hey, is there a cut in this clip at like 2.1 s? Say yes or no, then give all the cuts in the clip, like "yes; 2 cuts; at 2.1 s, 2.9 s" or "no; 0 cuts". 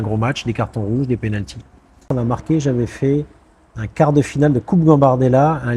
yes; 1 cut; at 2.1 s